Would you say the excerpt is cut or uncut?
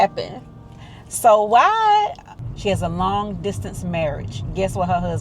cut